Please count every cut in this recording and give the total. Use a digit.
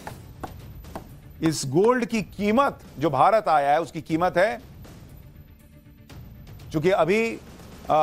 0